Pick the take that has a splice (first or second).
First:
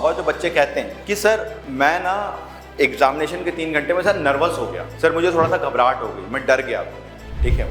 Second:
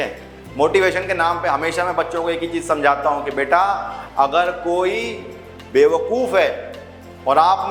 first